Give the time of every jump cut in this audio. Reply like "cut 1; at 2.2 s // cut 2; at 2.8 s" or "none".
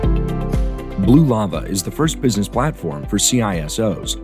cut 1; at 0.9 s